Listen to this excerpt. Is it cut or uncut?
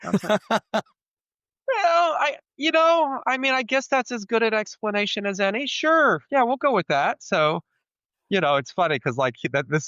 uncut